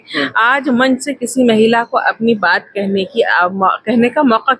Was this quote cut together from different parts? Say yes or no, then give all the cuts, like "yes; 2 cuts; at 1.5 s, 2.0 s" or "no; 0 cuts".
no; 0 cuts